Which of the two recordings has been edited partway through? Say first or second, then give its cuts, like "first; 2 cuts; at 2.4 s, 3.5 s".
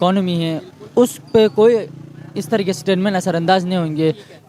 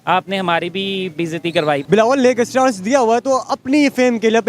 second; 1 cut; at 1.8 s